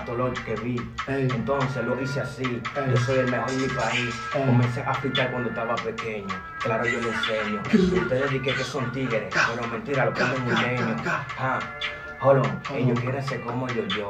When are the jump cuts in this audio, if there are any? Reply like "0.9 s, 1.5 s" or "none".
none